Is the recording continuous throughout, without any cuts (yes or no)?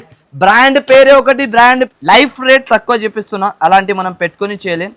no